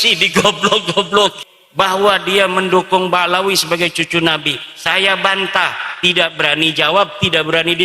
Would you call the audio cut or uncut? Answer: cut